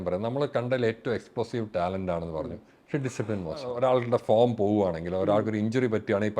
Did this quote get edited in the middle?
yes; 1 cut; at 3.7 s

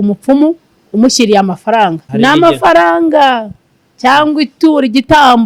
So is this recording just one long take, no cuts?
no; 1 cut; at 2.0 s

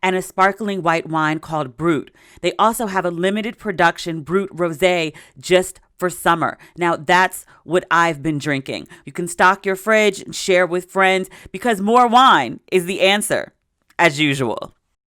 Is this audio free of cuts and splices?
no; 1 cut; at 8.9 s

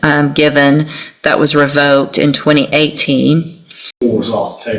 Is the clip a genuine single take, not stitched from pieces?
no; 1 cut; at 3.8 s

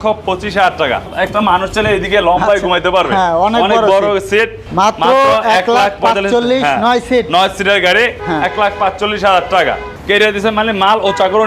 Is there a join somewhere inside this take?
yes; 3 cuts; at 1.1 s, 4.6 s, 9.9 s

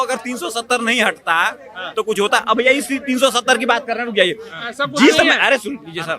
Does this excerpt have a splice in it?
no; 0 cuts

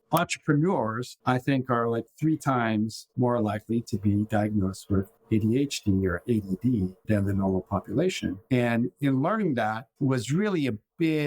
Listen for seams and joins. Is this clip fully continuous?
no; 1 cut; at 3.0 s

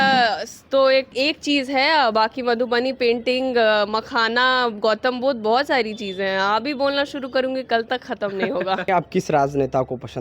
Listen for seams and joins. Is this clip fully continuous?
no; 2 cuts; at 1.1 s, 8.9 s

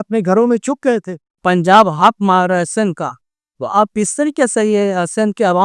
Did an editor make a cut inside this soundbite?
yes; 1 cut; at 1.4 s

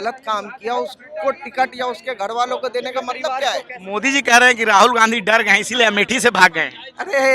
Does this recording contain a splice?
yes; 1 cut; at 3.8 s

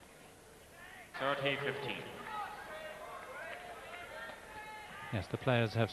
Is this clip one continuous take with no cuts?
yes; 0 cuts

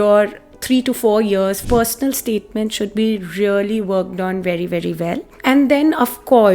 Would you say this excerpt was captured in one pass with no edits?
no; 2 cuts; at 1.6 s, 5.3 s

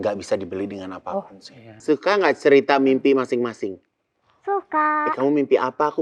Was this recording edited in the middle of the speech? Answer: yes; 1 cut; at 1.8 s

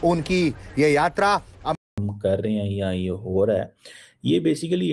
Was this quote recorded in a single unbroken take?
no; 1 cut; at 1.8 s

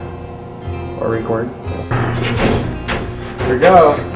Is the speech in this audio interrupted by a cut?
yes; 1 cut; at 1.9 s

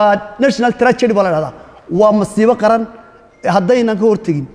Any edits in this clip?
no; 0 cuts

